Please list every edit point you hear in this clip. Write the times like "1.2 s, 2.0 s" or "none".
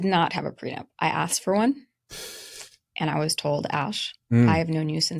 none